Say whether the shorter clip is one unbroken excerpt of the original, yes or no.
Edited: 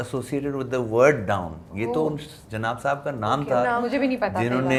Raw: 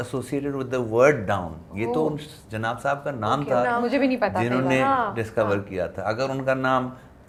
yes